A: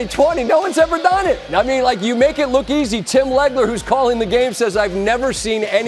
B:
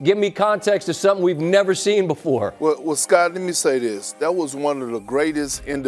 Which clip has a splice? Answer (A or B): B